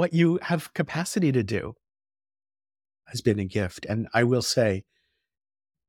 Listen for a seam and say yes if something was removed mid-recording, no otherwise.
yes